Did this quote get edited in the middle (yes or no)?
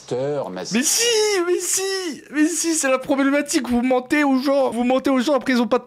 yes